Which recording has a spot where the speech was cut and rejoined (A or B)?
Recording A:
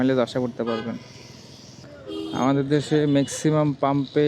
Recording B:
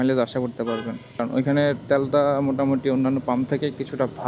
B